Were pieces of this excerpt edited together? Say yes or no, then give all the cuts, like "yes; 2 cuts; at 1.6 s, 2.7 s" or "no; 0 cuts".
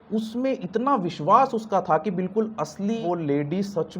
yes; 1 cut; at 3.0 s